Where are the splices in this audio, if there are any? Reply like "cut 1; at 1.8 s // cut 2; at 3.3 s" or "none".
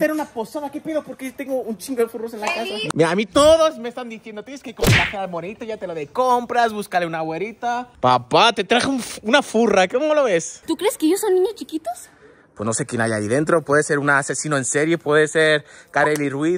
cut 1; at 2.9 s // cut 2; at 10.6 s

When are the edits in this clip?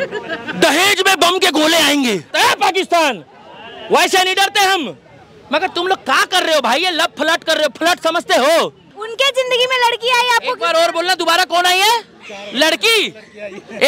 cut 1; at 2.3 s // cut 2; at 9.0 s

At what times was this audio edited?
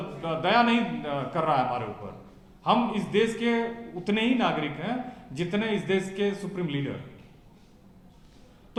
none

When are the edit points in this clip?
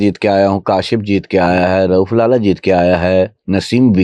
none

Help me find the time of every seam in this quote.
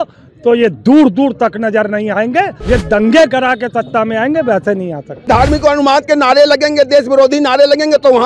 cut 1; at 2.6 s // cut 2; at 5.1 s

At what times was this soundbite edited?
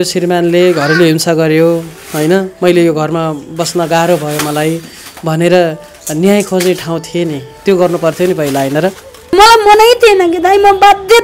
cut 1; at 9.3 s

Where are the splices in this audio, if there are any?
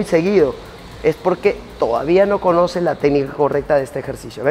none

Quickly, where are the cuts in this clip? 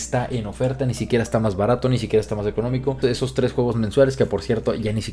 cut 1; at 3.0 s

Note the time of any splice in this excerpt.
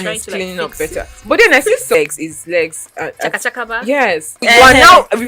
cut 1; at 1.9 s // cut 2; at 4.5 s

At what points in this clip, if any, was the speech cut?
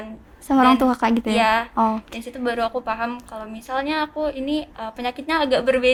none

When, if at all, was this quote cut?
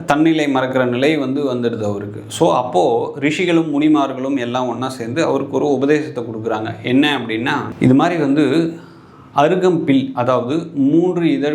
none

